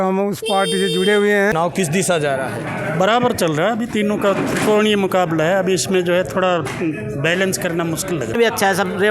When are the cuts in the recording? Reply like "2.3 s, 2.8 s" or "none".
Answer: 1.5 s, 8.4 s